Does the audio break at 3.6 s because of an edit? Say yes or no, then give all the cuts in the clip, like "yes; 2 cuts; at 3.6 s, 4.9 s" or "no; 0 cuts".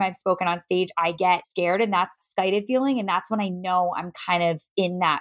no; 2 cuts; at 1.2 s, 2.2 s